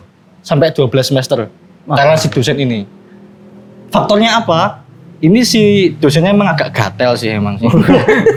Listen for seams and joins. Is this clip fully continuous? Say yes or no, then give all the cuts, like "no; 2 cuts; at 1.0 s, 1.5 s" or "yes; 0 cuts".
yes; 0 cuts